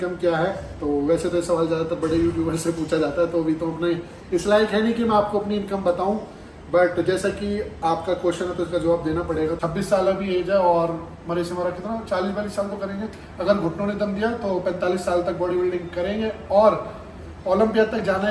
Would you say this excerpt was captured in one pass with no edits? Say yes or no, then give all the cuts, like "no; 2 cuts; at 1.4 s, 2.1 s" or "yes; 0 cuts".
no; 1 cut; at 9.6 s